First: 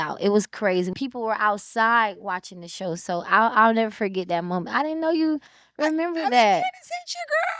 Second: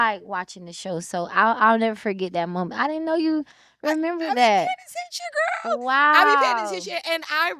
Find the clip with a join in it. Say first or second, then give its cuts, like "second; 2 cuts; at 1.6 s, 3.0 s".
first; 1 cut; at 0.9 s